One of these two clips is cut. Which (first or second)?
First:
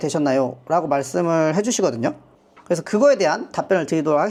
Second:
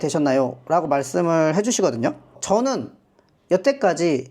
second